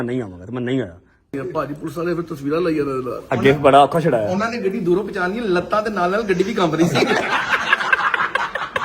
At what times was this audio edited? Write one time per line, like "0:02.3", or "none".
0:01.3
0:07.3